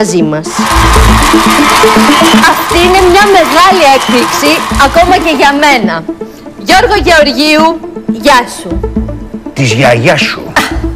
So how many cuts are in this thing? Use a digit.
1